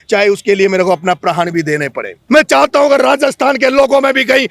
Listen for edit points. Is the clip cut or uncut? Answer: cut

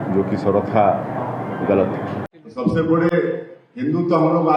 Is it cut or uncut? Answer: uncut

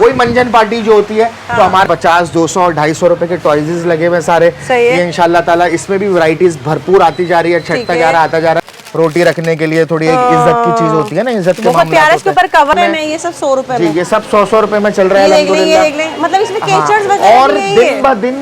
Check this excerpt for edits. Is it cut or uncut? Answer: cut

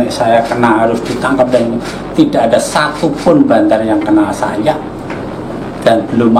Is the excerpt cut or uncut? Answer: uncut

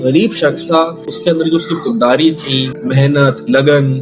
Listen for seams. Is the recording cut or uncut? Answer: cut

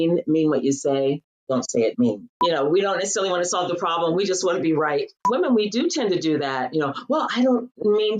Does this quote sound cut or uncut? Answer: cut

